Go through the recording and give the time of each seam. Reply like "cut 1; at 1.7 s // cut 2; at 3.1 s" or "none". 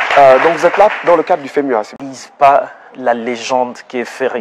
cut 1; at 2.0 s